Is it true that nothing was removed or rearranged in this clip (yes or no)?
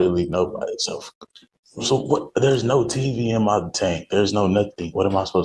yes